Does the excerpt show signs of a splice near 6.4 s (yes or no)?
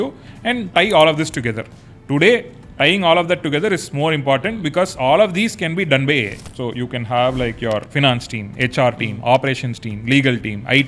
yes